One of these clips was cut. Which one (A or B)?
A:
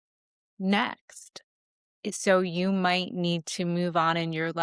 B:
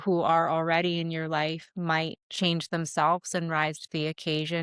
B